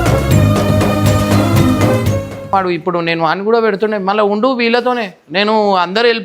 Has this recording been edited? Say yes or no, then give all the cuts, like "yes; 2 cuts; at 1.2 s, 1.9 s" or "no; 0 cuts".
yes; 1 cut; at 2.5 s